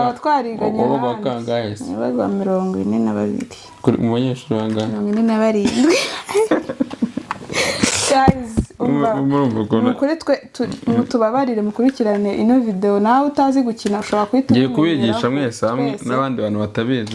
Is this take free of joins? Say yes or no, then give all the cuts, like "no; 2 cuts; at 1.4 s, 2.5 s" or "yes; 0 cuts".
yes; 0 cuts